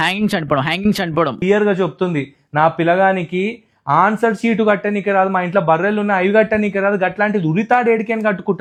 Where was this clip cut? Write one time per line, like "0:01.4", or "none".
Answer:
none